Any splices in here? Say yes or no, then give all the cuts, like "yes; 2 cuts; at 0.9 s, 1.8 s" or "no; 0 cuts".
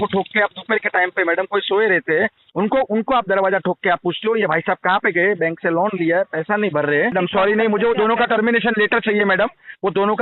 yes; 1 cut; at 7.1 s